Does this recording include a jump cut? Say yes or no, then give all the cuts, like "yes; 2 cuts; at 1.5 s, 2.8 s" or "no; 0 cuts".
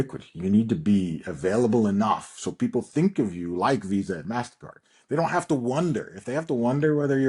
no; 0 cuts